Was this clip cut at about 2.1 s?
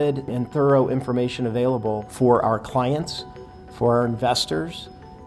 yes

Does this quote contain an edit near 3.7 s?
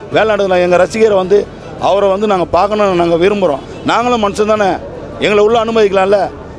yes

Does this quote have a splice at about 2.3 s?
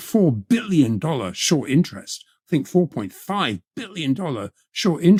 no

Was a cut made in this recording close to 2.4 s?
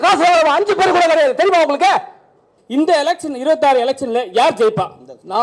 yes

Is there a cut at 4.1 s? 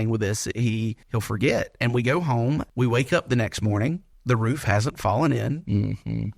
yes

